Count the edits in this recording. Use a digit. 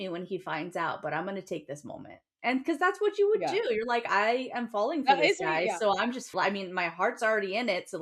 1